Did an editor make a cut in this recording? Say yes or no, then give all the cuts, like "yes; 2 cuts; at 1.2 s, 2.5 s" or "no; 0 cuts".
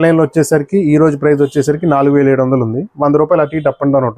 no; 0 cuts